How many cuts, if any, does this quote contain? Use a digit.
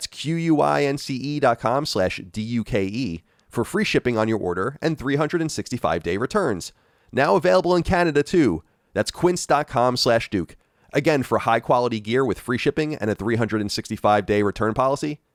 0